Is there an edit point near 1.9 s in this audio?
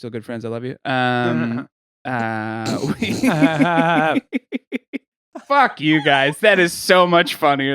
no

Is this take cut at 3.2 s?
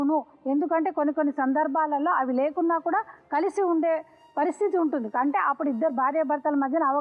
no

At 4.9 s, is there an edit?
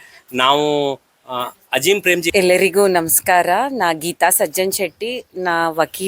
no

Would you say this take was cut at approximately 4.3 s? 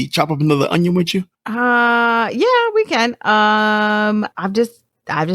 yes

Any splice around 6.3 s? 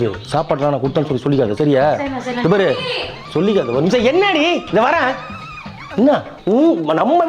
yes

